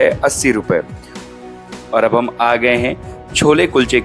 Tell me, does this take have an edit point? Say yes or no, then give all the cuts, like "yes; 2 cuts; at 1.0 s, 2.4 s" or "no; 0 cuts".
yes; 1 cut; at 1.7 s